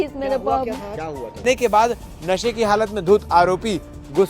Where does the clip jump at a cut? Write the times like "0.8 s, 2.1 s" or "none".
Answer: 1.4 s

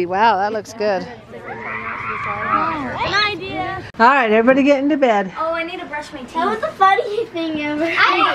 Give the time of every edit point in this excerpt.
3.9 s

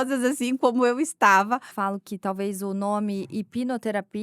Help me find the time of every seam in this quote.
1.7 s

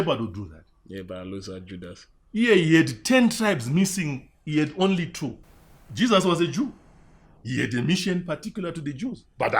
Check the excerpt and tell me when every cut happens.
5.4 s

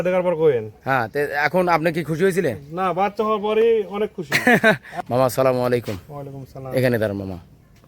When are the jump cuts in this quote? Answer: 4.9 s

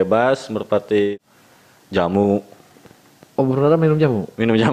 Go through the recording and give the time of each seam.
1.1 s

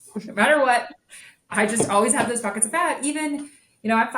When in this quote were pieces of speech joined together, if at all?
none

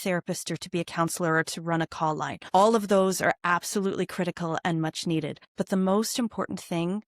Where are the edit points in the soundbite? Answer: 2.3 s, 5.4 s

